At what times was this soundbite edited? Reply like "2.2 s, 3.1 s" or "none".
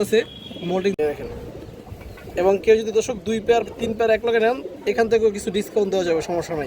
1.0 s